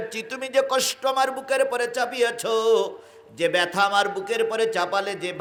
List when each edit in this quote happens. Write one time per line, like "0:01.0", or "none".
none